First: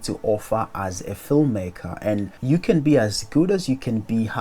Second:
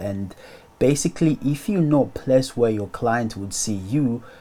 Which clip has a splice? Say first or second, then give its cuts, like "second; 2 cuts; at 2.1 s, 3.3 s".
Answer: first; 1 cut; at 2.3 s